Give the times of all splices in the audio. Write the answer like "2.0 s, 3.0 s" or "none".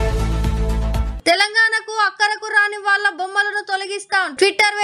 1.1 s